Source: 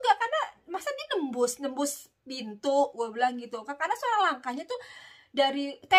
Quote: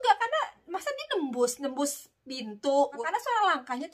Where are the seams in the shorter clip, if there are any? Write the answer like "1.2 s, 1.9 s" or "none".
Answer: 3.0 s

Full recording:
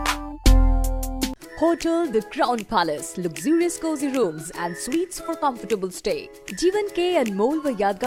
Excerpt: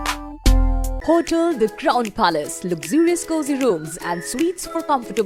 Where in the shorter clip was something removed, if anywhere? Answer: 0.9 s

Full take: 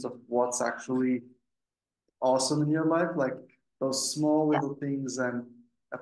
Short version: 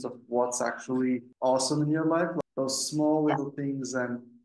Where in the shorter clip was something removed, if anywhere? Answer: 1.3 s, 2.4 s

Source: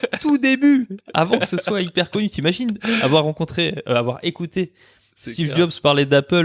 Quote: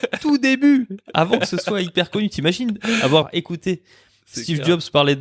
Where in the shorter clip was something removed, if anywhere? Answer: 3.2 s

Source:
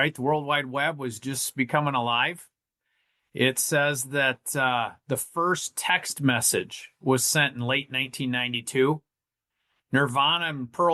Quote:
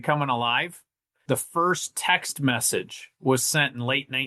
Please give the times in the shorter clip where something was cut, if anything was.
1.2 s

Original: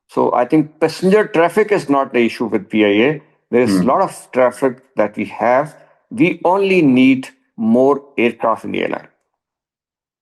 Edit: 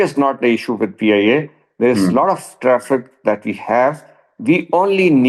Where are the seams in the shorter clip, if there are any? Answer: none

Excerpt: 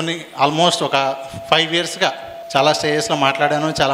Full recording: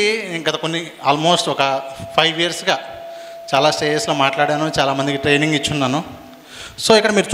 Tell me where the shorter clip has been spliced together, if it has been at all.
2.3 s

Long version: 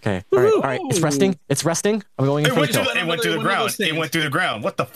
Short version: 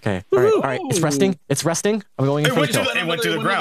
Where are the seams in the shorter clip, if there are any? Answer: none

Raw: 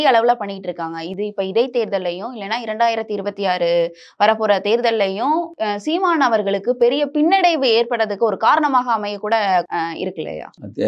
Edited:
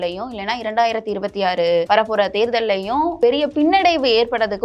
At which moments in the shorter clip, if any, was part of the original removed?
1.9 s, 3.2 s

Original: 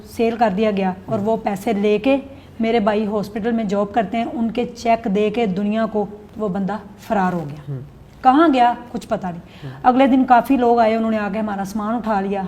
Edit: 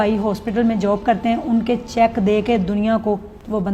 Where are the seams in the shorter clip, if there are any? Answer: none

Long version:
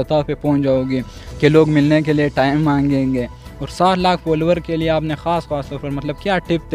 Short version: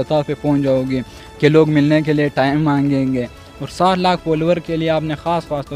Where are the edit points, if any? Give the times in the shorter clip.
none

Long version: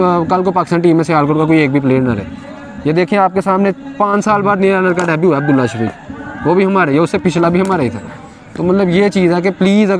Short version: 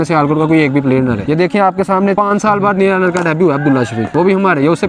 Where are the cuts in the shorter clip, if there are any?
1.2 s, 2.1 s, 4.0 s

